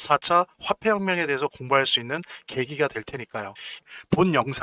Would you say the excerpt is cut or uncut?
cut